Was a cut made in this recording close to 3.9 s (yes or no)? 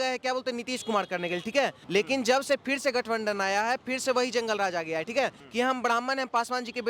no